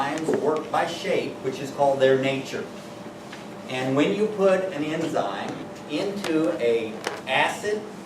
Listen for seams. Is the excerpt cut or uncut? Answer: cut